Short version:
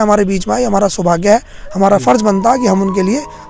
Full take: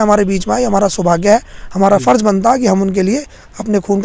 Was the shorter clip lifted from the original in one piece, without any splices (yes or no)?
yes